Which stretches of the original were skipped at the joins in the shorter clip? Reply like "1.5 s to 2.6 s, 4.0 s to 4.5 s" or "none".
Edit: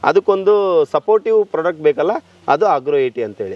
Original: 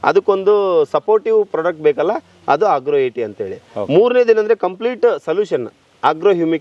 none